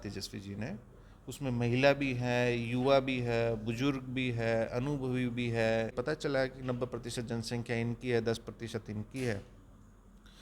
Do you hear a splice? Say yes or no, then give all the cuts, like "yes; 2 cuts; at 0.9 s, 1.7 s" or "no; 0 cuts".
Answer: yes; 1 cut; at 5.9 s